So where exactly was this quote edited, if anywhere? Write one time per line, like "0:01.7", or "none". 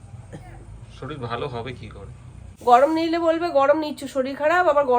0:02.5